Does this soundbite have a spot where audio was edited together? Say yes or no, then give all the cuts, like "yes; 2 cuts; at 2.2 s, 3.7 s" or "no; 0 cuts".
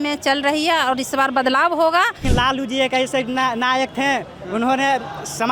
yes; 1 cut; at 2.3 s